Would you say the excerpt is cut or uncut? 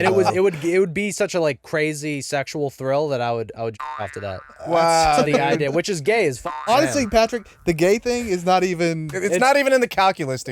cut